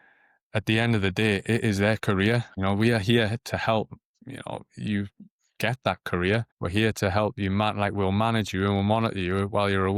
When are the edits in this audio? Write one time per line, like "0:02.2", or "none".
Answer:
none